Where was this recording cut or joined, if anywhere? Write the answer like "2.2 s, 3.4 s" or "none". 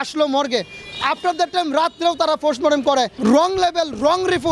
3.1 s